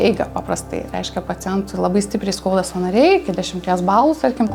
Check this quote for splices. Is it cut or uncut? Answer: uncut